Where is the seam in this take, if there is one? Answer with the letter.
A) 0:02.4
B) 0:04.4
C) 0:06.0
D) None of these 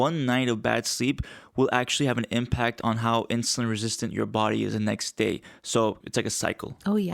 C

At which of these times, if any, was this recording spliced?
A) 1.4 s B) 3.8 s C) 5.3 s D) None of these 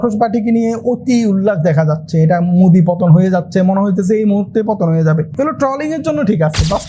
C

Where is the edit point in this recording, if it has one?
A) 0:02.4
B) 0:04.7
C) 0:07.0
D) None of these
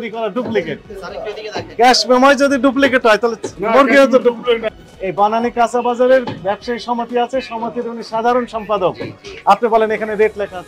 B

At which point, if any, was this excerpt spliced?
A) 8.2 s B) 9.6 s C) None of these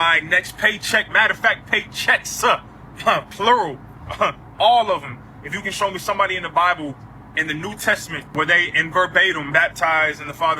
A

